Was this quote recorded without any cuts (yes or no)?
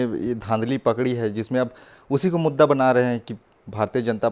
yes